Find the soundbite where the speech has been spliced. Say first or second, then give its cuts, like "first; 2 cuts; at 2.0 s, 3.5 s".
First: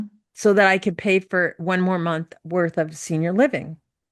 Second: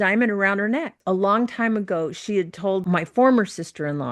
second; 2 cuts; at 0.9 s, 2.8 s